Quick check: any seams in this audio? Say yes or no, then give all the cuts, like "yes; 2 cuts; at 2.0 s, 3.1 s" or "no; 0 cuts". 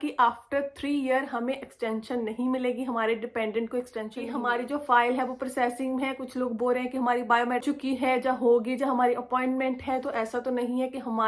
yes; 2 cuts; at 4.2 s, 7.6 s